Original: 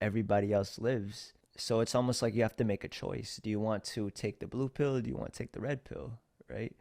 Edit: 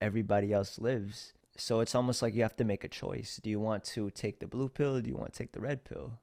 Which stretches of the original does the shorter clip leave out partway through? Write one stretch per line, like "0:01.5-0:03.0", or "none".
none